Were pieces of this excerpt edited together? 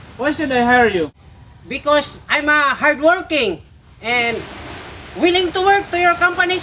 no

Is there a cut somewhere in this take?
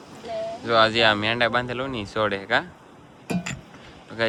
no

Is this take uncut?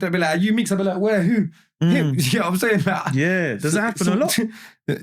yes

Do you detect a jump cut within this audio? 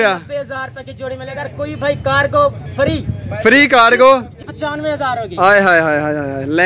yes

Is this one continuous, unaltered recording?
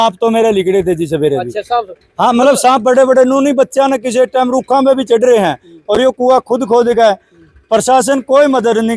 yes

